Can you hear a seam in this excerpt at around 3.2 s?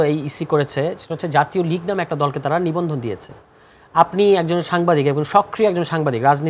no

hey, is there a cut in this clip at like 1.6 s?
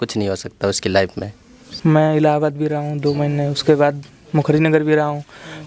yes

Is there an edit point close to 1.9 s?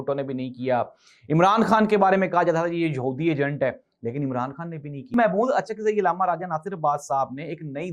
no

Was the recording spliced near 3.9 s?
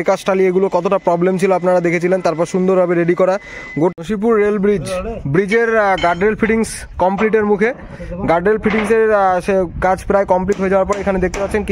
yes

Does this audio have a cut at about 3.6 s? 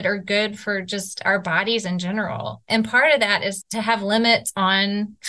yes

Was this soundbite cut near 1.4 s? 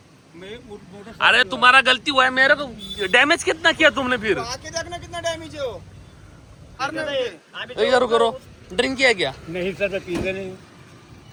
no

